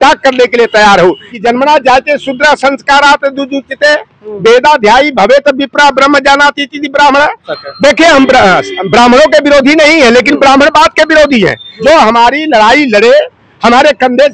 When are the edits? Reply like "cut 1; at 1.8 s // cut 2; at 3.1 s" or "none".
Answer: cut 1; at 1.3 s // cut 2; at 7.5 s // cut 3; at 11.7 s